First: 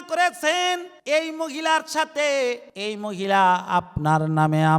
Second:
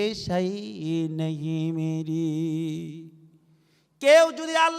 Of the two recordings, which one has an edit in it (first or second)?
first